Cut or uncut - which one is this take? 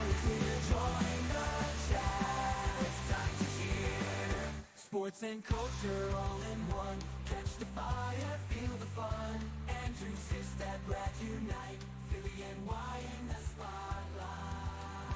uncut